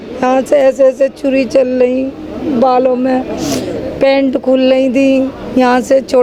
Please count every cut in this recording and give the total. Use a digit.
0